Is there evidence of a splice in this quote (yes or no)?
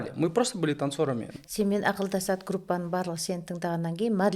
yes